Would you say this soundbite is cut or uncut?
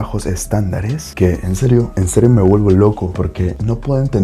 cut